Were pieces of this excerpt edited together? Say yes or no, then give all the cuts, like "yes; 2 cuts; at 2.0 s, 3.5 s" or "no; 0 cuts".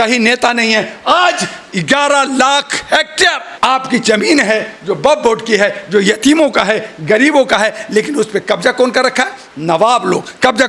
yes; 1 cut; at 3.5 s